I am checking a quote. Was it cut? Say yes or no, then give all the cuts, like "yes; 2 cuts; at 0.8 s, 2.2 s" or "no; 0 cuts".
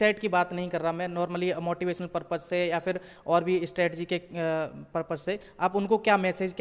no; 0 cuts